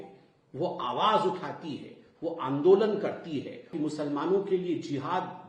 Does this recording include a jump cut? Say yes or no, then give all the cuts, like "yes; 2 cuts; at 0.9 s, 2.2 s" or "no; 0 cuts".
yes; 1 cut; at 3.7 s